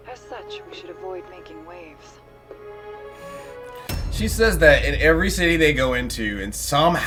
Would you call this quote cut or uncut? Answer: uncut